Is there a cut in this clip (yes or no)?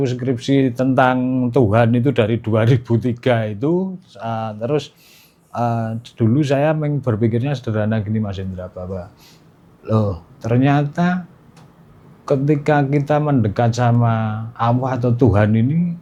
no